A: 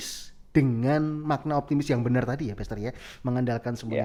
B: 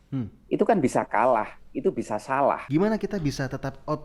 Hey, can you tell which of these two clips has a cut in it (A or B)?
B